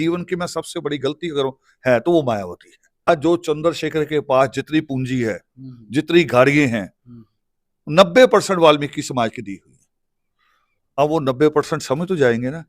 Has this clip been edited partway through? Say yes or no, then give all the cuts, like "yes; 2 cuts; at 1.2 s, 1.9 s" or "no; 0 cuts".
yes; 1 cut; at 3.1 s